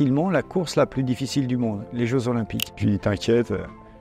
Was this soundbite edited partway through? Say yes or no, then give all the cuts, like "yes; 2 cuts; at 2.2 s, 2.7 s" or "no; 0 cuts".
yes; 1 cut; at 2.7 s